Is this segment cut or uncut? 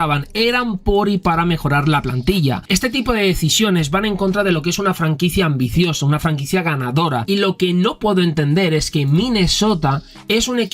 cut